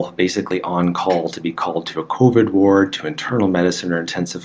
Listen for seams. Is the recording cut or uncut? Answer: uncut